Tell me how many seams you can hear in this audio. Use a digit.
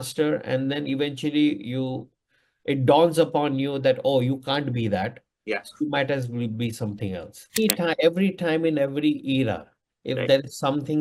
1